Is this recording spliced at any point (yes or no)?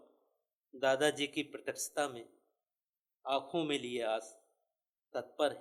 no